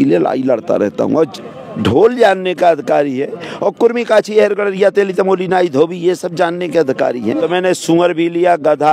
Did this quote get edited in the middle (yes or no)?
yes